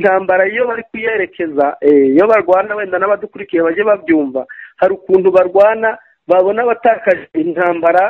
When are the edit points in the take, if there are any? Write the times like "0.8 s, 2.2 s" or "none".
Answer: none